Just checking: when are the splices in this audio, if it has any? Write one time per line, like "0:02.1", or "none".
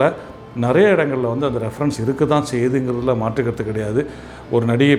none

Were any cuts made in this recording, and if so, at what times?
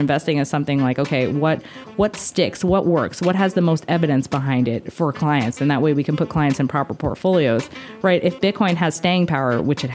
none

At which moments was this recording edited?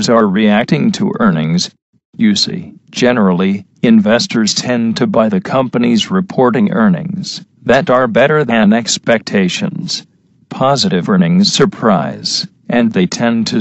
0:08.3

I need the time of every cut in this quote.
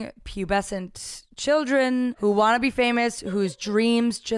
0:02.1

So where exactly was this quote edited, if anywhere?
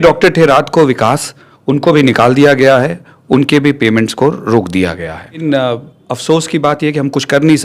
0:05.4

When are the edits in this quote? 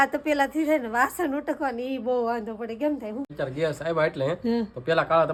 none

